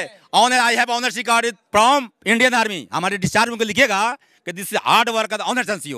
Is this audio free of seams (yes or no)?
yes